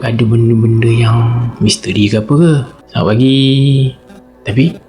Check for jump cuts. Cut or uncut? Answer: cut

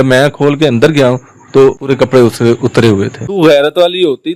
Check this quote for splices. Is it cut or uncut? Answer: cut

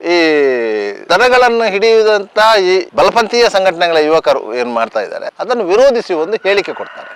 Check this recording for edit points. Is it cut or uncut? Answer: uncut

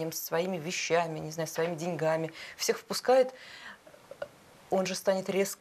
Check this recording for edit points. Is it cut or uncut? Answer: uncut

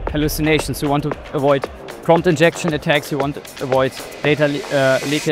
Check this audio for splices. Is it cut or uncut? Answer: uncut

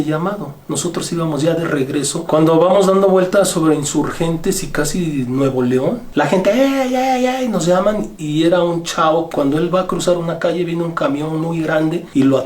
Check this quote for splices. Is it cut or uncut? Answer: cut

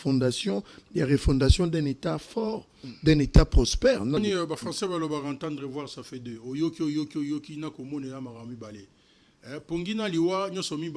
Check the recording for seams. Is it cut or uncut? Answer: cut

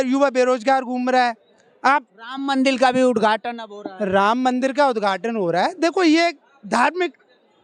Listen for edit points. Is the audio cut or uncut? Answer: uncut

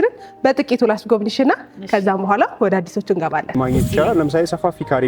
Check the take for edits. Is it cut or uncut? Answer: cut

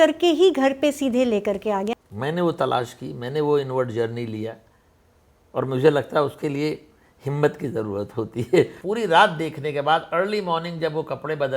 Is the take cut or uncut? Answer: cut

